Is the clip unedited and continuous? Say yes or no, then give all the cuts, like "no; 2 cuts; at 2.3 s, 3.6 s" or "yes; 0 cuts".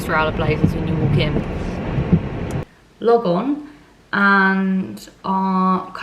no; 1 cut; at 2.6 s